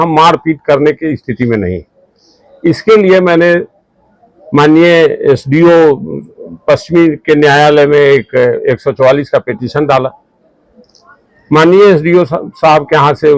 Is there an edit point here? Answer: no; 0 cuts

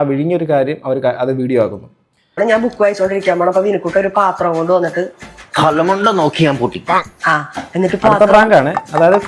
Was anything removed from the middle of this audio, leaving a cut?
yes; 1 cut; at 2.4 s

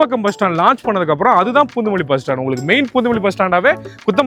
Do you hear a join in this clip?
no; 0 cuts

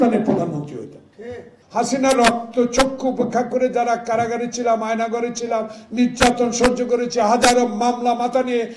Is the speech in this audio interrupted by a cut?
yes; 1 cut; at 1.5 s

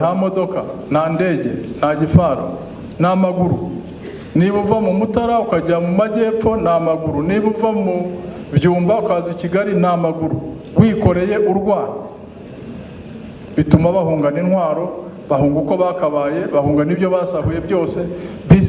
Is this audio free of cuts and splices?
no; 1 cut; at 13.3 s

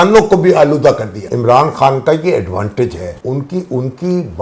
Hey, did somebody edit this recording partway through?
yes; 2 cuts; at 1.3 s, 3.1 s

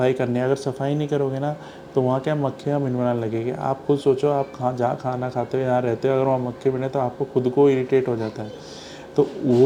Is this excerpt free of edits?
yes; 0 cuts

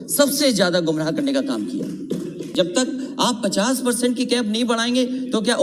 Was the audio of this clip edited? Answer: yes; 1 cut; at 2.5 s

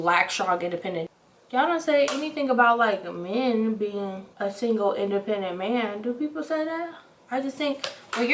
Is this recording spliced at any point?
yes; 1 cut; at 4.2 s

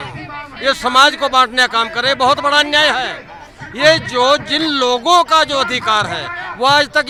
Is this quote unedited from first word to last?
yes; 0 cuts

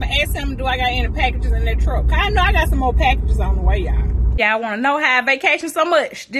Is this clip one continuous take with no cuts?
no; 1 cut; at 4.3 s

